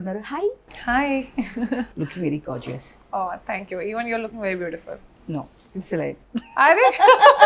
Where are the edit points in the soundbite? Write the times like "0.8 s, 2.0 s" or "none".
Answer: none